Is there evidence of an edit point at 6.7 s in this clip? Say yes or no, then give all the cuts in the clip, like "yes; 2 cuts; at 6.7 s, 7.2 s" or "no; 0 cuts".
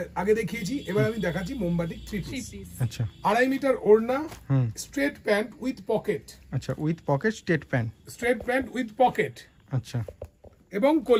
no; 0 cuts